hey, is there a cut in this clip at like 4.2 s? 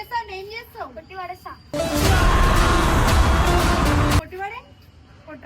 yes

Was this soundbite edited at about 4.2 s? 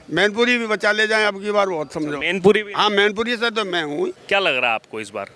yes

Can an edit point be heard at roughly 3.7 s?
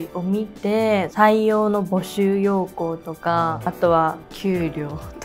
yes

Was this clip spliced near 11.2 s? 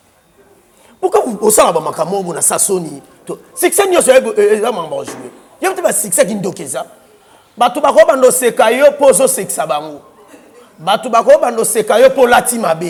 no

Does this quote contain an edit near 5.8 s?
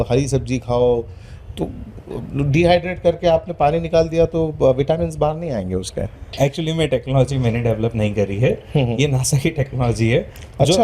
no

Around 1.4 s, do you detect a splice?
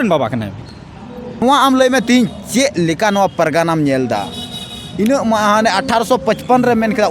yes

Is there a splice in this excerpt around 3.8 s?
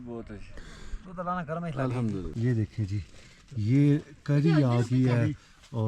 no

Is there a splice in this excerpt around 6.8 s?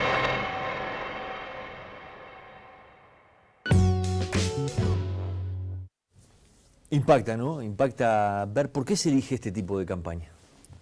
no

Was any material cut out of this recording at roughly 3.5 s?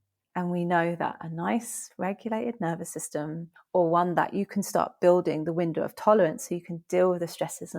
yes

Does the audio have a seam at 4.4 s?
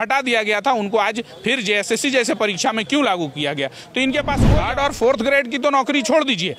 yes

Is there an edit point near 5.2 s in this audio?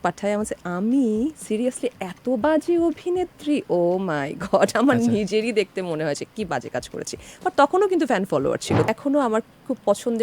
no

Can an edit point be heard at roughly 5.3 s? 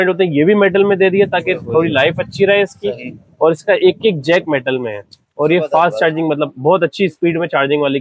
no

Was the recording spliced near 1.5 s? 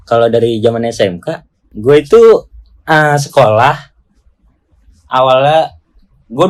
no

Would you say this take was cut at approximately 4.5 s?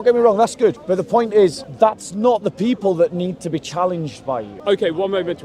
yes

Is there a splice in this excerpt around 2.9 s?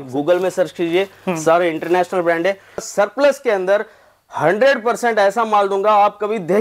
yes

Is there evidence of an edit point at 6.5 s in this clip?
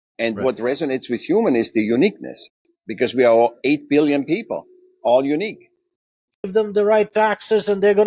yes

